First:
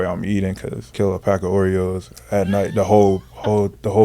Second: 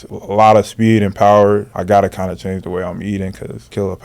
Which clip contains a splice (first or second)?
second